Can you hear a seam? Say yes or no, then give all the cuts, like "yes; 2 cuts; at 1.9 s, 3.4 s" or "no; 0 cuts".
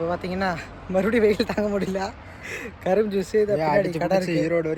no; 0 cuts